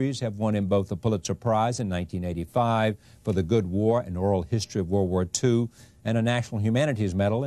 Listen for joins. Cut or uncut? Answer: uncut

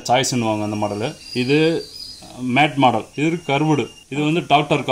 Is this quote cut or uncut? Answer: cut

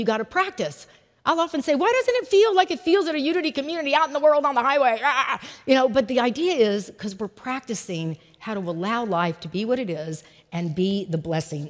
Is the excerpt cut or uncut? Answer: uncut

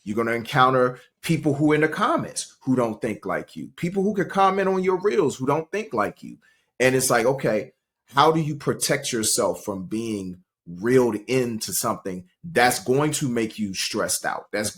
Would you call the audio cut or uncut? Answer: uncut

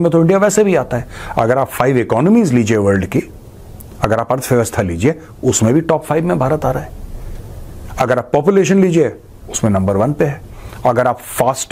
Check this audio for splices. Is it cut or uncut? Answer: uncut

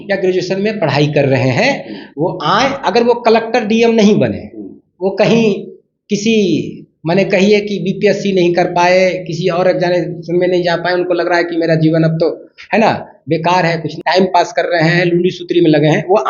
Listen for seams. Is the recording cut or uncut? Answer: cut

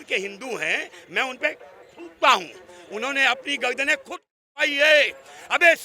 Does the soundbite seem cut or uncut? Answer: uncut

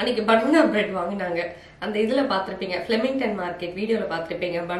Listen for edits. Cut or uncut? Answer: uncut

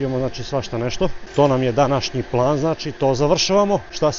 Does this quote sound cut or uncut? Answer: uncut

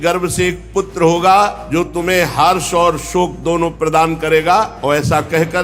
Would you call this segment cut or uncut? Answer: cut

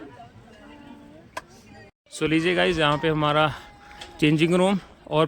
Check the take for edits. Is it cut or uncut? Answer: cut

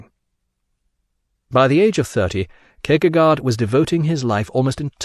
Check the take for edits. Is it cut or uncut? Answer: cut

